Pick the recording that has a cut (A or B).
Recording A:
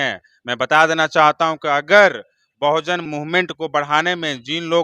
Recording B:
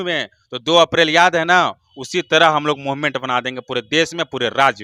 A